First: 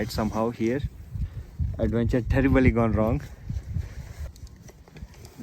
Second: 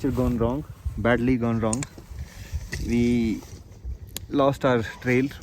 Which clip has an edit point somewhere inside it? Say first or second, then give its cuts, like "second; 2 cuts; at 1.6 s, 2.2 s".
first; 1 cut; at 4.3 s